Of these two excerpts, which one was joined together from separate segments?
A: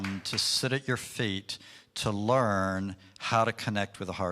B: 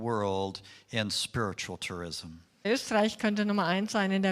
B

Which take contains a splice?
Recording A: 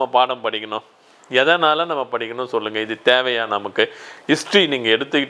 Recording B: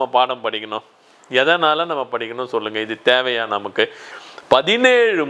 B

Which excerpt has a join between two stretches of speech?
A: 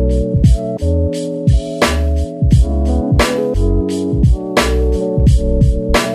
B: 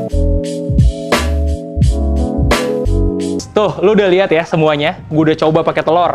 B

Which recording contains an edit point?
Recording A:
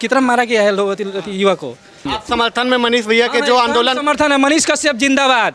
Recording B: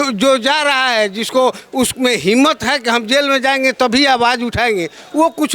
A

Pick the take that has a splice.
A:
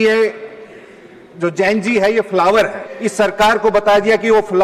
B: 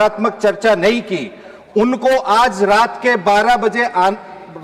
A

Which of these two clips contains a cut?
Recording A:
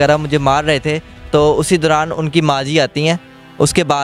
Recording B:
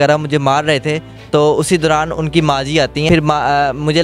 B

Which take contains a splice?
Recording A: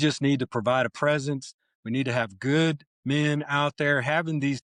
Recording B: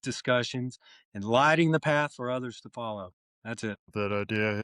B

